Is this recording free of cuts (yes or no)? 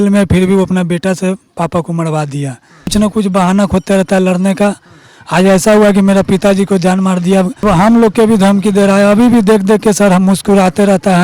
no